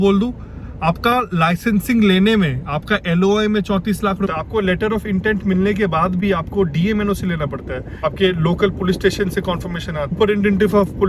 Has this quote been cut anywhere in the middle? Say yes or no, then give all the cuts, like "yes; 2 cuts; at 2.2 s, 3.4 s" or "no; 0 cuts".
yes; 3 cuts; at 4.3 s, 7.8 s, 10.2 s